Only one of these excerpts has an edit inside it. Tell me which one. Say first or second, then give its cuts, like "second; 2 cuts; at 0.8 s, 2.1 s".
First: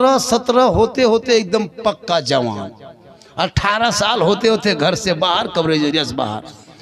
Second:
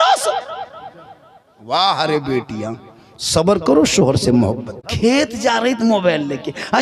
second; 1 cut; at 4.9 s